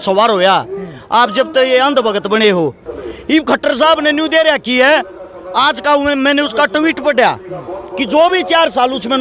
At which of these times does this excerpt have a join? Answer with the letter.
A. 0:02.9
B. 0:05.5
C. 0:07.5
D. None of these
A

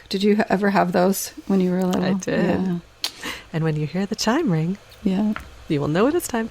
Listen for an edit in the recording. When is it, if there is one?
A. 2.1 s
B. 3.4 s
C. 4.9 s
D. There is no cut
C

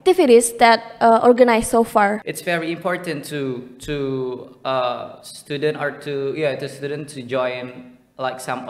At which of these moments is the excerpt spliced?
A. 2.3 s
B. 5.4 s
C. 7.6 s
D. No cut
A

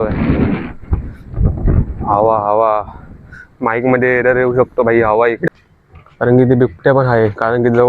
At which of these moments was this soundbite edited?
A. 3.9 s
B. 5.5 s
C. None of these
B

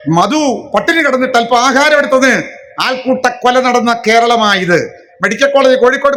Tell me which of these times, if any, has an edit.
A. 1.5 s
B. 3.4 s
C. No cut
C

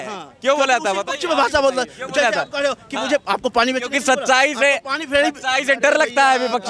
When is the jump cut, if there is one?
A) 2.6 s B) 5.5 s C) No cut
C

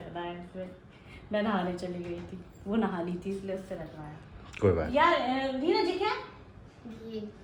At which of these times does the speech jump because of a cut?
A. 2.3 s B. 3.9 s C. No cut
C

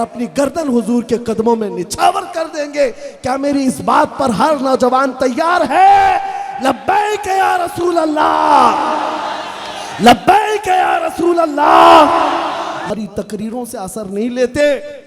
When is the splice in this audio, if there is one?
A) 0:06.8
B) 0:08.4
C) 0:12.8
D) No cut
C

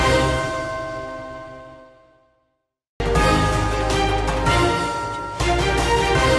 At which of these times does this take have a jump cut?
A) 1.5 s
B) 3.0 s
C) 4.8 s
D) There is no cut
B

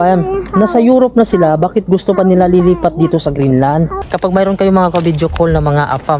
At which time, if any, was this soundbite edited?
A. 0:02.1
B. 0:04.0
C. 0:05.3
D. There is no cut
B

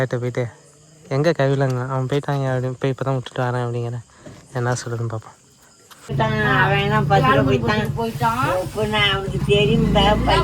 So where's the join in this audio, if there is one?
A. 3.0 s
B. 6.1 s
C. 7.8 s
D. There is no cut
B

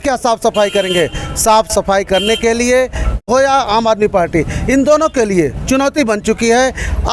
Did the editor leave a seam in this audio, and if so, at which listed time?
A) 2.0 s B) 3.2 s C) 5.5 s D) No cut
B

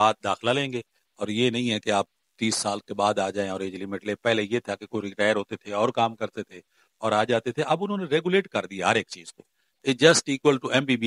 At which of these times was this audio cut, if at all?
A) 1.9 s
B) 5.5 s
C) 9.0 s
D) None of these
D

